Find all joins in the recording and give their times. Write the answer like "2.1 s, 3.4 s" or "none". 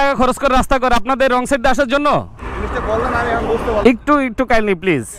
2.4 s